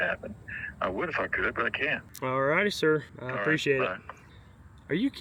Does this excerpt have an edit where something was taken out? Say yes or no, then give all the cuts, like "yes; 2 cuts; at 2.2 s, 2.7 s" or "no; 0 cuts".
no; 0 cuts